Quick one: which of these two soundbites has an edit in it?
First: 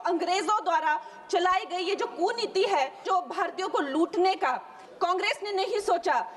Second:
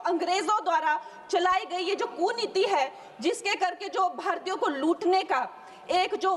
first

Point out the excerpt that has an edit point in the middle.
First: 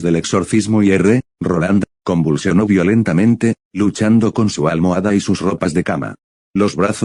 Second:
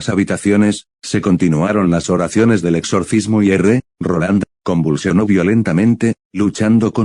second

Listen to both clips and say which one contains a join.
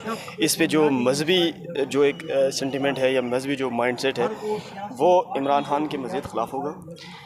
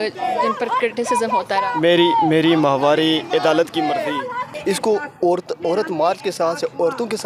second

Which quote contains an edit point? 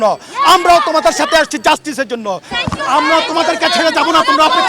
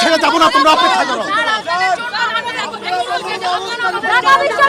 first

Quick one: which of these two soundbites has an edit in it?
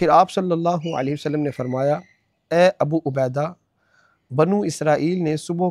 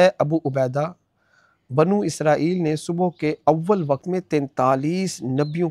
second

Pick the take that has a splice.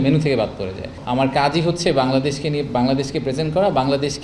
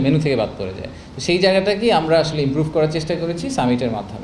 first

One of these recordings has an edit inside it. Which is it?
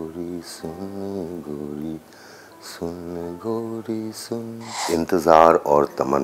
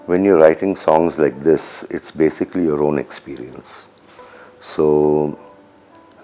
first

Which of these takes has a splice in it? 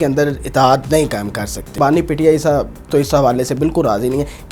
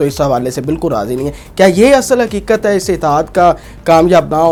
first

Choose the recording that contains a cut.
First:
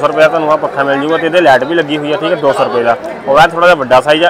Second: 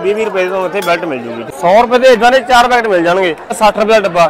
second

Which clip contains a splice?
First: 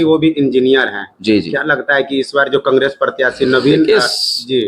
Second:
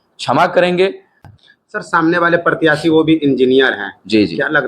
second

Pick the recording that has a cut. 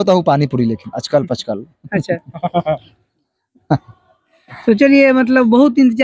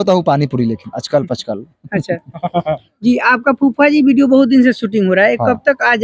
second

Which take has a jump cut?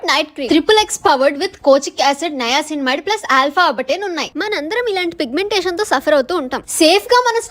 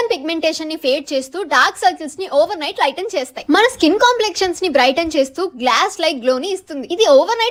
first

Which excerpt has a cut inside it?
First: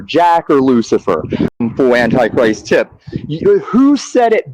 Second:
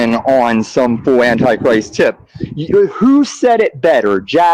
first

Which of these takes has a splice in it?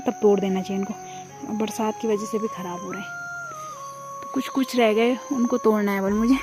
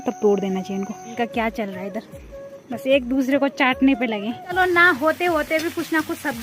second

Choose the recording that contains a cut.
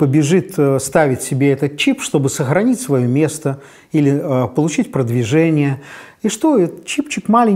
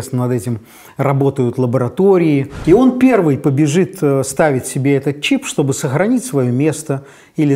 second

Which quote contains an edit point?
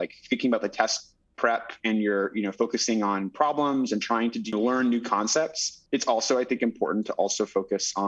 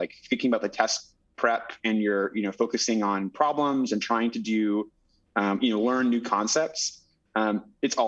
first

